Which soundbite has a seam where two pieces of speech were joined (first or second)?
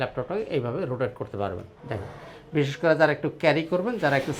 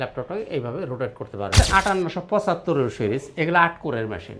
second